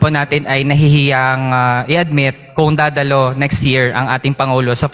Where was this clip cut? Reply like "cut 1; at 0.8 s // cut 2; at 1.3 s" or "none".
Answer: none